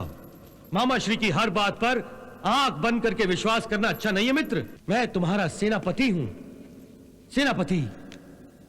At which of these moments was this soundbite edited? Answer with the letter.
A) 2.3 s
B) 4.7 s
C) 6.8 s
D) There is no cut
B